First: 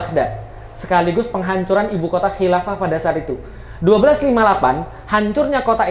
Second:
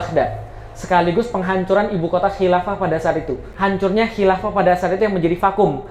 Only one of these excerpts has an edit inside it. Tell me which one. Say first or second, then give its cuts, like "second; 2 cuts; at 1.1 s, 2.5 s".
second; 1 cut; at 3.5 s